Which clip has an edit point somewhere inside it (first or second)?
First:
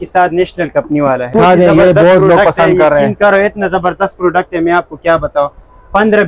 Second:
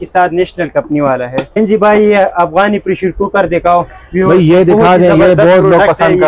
first